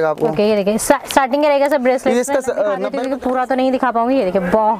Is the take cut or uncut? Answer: cut